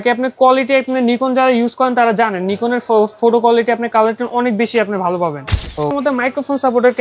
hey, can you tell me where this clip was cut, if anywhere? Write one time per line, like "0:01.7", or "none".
0:05.9